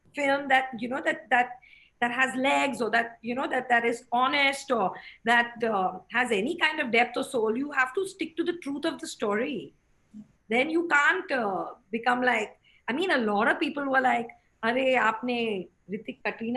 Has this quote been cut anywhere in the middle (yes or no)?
no